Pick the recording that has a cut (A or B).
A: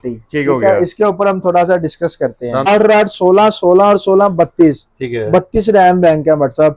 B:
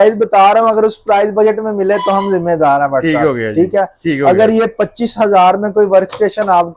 A